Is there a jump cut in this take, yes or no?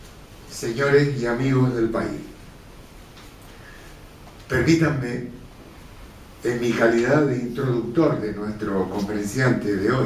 no